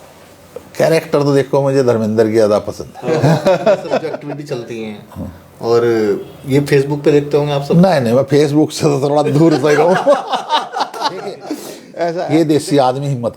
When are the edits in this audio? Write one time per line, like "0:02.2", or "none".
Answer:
0:04.1
0:12.2